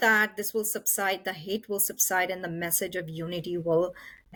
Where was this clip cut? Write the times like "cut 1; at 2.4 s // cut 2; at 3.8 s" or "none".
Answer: none

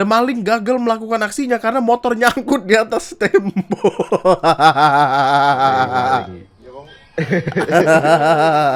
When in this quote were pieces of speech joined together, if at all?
none

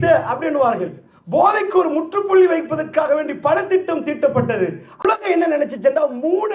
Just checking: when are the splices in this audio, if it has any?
cut 1; at 5.1 s

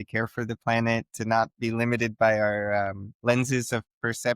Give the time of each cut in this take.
cut 1; at 3.1 s

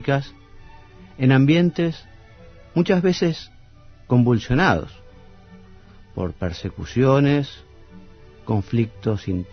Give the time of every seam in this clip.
none

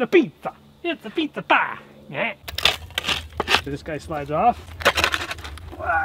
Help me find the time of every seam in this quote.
cut 1; at 2.5 s // cut 2; at 3.7 s // cut 3; at 4.7 s

